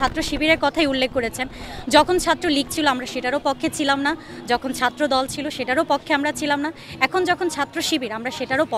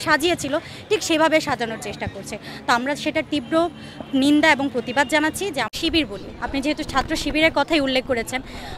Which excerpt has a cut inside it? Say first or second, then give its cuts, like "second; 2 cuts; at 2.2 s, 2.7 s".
second; 1 cut; at 5.7 s